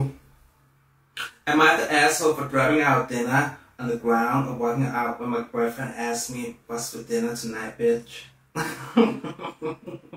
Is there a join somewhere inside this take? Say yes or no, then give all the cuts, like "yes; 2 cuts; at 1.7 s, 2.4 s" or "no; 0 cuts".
no; 0 cuts